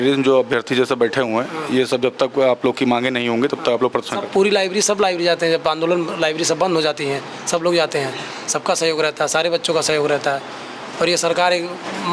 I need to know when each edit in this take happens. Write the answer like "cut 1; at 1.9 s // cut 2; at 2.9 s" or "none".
none